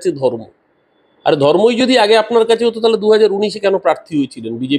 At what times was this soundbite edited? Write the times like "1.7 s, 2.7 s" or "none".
none